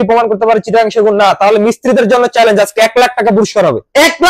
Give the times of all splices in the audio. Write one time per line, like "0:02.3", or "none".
none